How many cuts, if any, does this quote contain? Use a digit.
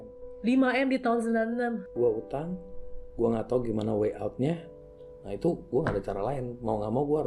2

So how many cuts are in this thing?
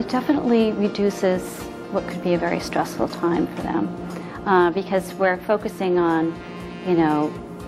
1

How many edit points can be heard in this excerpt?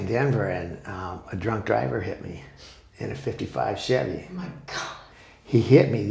1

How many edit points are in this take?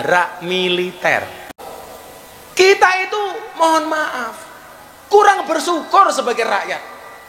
1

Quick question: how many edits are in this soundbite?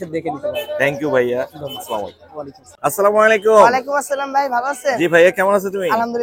0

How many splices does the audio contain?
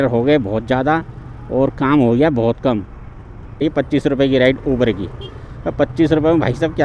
1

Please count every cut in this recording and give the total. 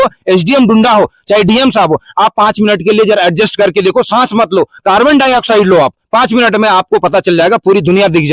0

